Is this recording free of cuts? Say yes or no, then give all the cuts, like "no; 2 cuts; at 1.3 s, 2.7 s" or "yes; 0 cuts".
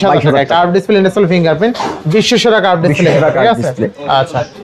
yes; 0 cuts